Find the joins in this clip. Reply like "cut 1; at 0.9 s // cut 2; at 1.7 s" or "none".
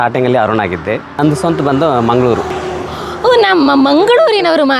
cut 1; at 1.1 s